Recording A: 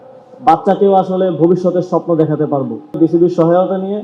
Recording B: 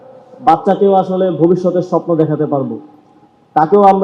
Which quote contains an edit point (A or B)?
A